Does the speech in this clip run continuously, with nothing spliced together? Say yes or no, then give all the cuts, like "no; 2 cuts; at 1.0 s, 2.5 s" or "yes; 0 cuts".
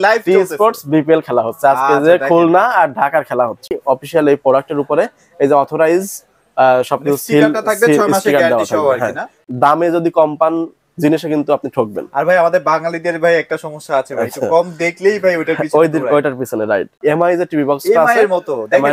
no; 3 cuts; at 3.8 s, 9.4 s, 17.0 s